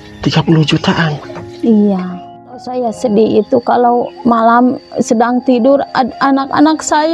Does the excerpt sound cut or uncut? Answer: cut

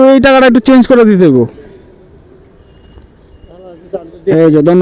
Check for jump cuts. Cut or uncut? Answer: uncut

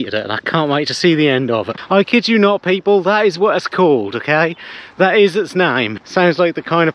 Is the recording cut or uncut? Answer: cut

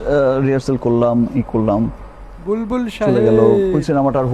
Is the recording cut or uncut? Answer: uncut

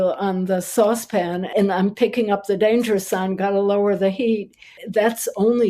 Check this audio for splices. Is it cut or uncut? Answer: cut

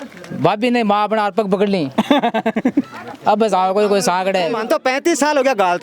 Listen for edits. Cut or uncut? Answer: cut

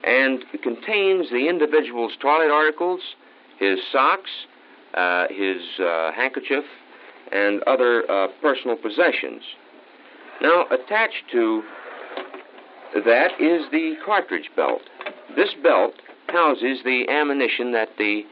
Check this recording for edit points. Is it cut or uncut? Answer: cut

